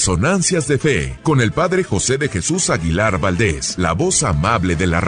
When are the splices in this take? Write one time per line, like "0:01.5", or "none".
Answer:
0:01.1
0:03.6